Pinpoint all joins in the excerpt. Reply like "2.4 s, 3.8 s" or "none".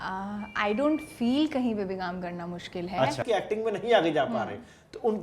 3.2 s